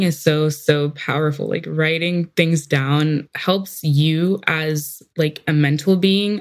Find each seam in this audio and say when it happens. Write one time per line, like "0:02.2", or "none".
0:03.3